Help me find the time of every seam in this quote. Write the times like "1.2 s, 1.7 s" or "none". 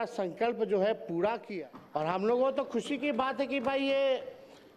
1.5 s